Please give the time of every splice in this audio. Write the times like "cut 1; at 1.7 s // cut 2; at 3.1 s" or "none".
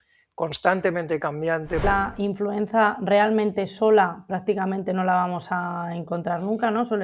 cut 1; at 1.8 s